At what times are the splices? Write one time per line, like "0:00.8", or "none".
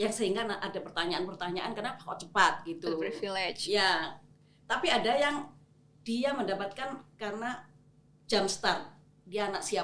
none